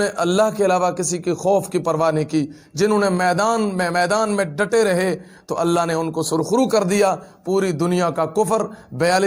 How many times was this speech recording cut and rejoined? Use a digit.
0